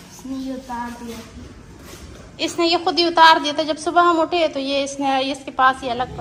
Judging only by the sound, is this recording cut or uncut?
uncut